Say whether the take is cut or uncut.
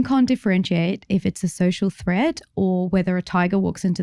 uncut